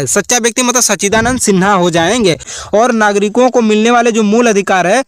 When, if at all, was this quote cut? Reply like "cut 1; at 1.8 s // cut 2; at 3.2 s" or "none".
cut 1; at 2.5 s